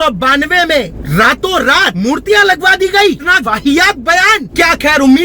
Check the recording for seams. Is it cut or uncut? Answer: cut